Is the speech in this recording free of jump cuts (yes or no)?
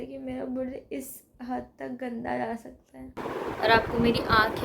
no